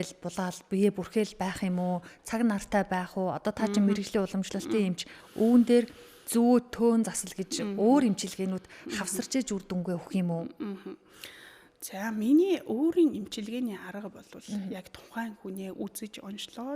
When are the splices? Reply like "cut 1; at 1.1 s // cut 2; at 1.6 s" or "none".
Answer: none